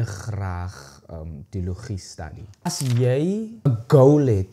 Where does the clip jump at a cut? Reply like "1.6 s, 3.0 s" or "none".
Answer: 2.7 s, 3.7 s